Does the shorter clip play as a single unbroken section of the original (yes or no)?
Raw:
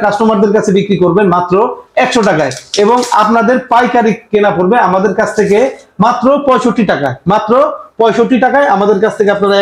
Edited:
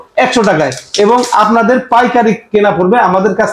yes